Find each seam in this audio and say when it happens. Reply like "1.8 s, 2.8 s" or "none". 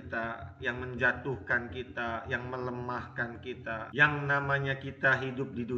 3.8 s